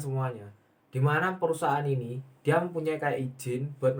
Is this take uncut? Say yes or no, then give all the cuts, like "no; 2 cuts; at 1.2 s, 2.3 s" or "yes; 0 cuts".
yes; 0 cuts